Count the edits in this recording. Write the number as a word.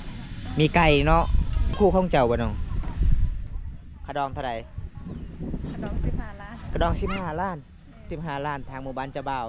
two